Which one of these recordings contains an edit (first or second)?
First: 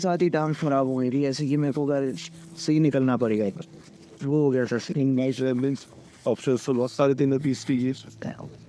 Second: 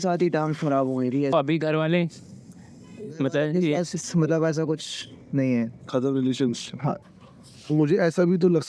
second